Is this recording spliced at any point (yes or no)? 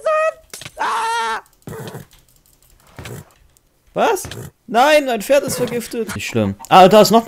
yes